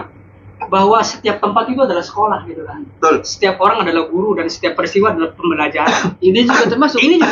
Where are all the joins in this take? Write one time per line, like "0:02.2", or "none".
none